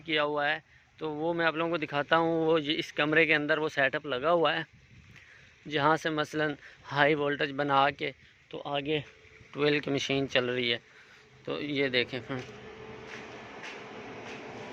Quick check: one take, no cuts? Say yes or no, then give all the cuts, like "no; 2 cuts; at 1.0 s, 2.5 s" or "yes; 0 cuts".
yes; 0 cuts